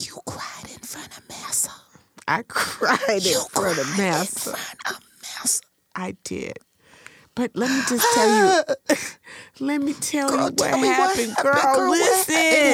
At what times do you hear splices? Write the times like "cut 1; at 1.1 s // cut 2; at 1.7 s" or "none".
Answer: none

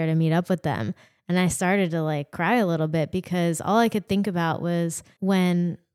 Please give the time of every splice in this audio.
cut 1; at 5.1 s

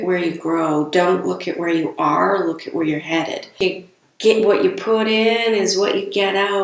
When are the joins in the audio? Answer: cut 1; at 3.6 s

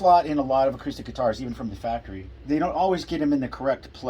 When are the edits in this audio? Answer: none

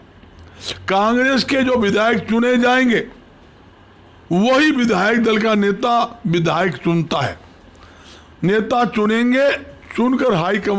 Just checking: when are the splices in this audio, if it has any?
none

